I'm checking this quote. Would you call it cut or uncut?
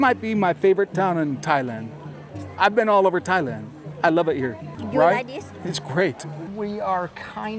cut